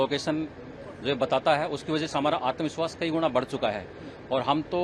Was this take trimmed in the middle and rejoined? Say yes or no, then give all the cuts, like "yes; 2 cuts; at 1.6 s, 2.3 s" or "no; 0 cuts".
no; 0 cuts